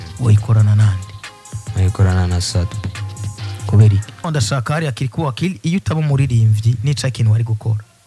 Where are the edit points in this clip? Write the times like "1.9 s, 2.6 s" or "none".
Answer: 4.2 s